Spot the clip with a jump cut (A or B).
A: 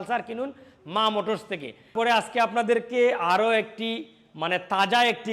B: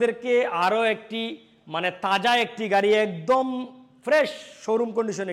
A